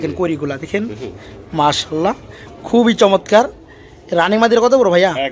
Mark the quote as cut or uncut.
uncut